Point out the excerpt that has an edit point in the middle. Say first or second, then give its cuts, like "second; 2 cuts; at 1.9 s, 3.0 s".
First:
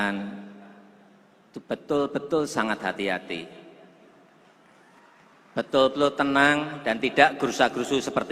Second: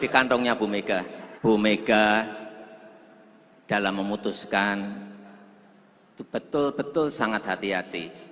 second; 1 cut; at 1.2 s